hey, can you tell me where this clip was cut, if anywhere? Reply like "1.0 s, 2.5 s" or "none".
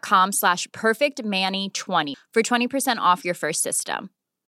2.1 s